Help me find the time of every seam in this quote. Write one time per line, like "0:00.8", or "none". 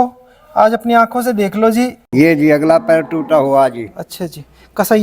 0:02.0